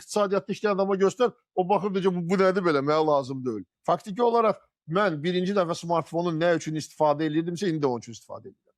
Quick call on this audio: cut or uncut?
cut